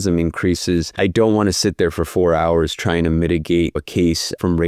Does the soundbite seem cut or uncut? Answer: cut